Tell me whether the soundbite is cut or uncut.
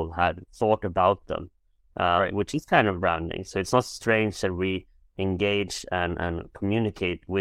uncut